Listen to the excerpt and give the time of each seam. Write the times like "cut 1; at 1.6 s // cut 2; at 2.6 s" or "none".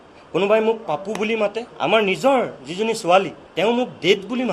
cut 1; at 1.7 s // cut 2; at 3.4 s